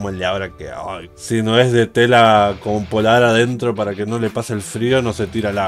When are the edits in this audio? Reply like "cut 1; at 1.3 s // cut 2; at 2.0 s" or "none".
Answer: none